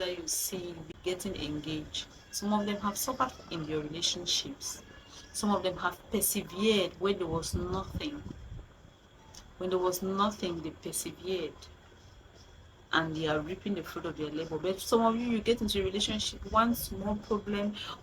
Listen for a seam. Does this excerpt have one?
yes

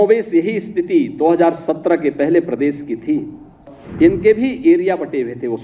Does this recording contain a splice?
yes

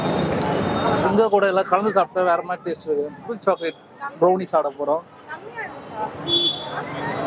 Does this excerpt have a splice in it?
yes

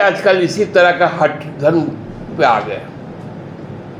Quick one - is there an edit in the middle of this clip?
no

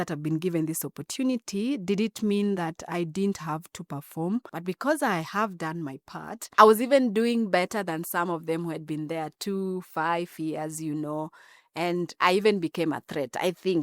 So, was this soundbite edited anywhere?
yes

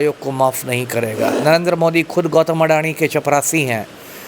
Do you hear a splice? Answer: yes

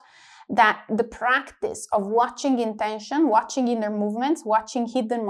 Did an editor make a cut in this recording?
no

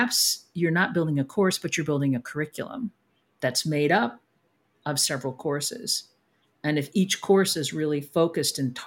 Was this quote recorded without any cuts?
yes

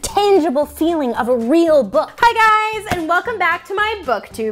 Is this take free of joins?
no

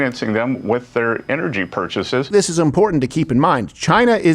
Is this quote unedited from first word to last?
no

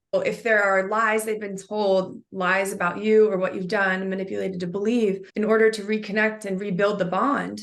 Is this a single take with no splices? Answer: no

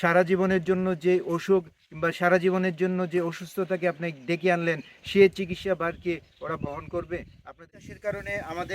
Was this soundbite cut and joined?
yes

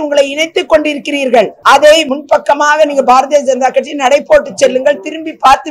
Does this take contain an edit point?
yes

